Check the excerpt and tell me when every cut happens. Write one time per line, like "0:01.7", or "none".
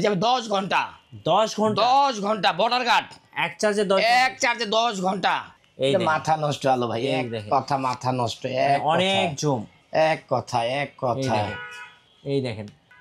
0:05.6

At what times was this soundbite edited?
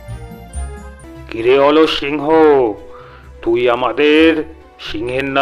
0:01.0

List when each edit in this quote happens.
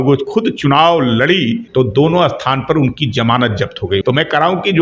0:01.6
0:04.0

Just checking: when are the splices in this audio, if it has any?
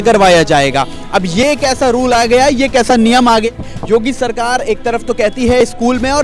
0:03.5

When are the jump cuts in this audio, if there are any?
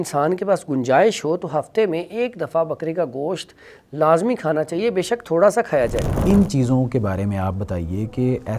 0:06.1

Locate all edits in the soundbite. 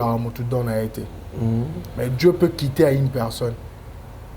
none

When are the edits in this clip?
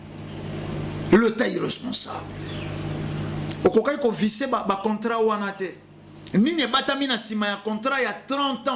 0:02.4

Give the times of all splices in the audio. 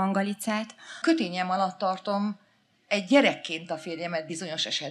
0:01.0

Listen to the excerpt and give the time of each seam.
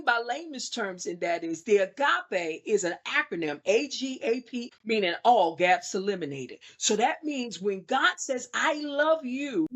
0:04.6

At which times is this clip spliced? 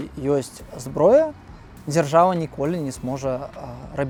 none

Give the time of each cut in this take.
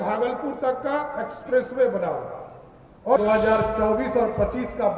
0:03.2

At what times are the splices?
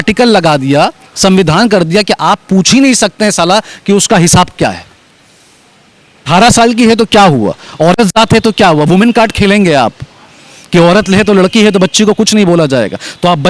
0:06.3

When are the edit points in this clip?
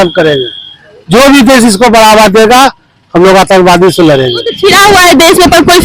0:04.6

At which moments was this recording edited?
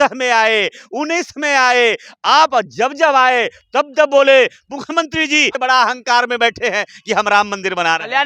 0:05.6

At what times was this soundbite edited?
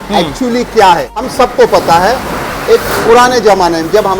0:01.2

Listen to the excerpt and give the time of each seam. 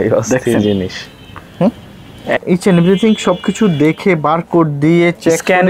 0:02.4

